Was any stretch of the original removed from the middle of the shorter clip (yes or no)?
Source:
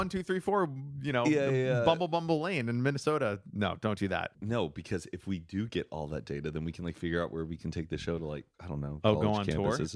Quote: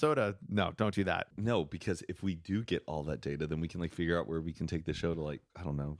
no